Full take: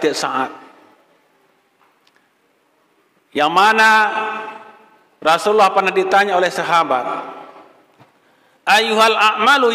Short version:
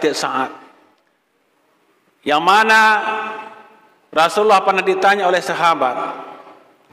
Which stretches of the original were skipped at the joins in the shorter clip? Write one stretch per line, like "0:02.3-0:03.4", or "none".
0:01.0-0:02.1